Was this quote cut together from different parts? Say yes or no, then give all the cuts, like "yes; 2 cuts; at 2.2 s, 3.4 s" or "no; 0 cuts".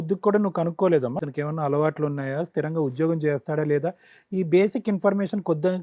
yes; 1 cut; at 1.2 s